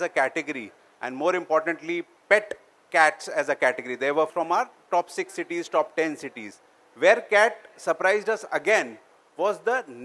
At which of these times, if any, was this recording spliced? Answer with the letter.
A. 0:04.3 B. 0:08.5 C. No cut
A